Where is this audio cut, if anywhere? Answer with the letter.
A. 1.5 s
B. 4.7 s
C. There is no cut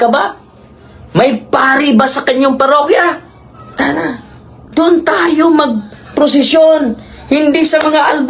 C